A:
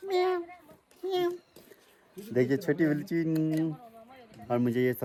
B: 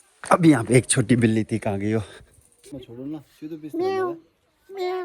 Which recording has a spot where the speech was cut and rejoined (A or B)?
B